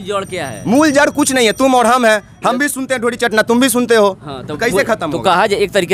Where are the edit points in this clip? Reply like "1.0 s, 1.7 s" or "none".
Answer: none